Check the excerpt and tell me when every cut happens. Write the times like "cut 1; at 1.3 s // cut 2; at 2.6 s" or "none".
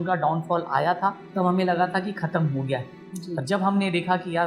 cut 1; at 1.2 s